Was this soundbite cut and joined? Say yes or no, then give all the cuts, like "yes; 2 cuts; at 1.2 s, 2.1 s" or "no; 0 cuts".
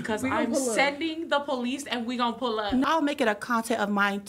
yes; 1 cut; at 2.9 s